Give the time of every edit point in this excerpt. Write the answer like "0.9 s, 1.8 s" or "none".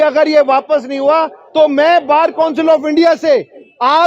none